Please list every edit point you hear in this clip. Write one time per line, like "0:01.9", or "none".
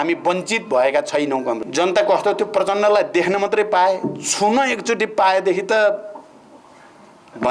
0:01.6